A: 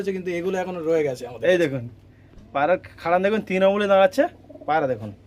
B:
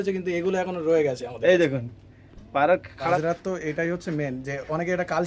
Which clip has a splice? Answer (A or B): B